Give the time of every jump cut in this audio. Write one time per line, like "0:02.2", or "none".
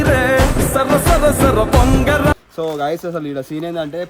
0:02.5